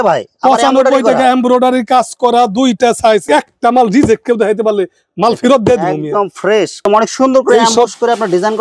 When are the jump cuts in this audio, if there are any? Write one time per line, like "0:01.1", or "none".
0:03.3
0:06.8